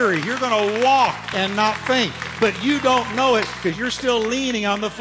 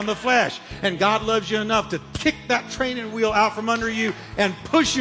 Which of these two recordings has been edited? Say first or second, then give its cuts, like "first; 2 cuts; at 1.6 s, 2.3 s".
first; 1 cut; at 3.8 s